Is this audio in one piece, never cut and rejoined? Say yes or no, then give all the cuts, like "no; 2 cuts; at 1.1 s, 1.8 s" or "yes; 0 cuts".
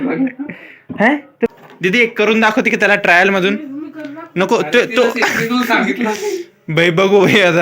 no; 1 cut; at 1.5 s